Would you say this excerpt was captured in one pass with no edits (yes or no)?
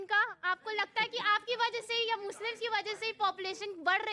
yes